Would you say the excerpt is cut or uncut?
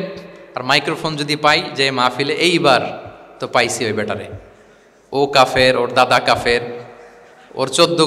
uncut